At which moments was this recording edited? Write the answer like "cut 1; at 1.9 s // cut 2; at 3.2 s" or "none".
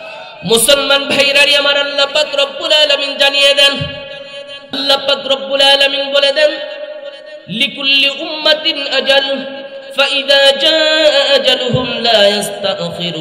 cut 1; at 4.8 s